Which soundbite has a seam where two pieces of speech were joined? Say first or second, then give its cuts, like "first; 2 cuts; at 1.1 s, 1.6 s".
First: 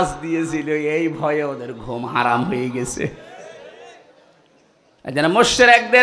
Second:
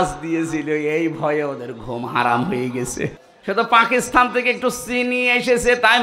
second; 1 cut; at 3.3 s